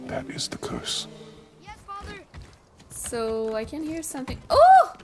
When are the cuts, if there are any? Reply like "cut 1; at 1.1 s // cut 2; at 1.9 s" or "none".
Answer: cut 1; at 1.5 s